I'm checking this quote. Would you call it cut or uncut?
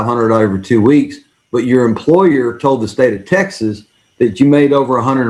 uncut